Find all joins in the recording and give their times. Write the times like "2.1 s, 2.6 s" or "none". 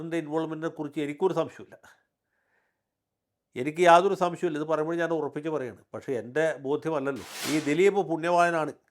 7.3 s